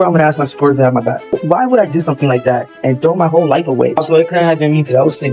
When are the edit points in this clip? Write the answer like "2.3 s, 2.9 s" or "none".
1.3 s, 4.0 s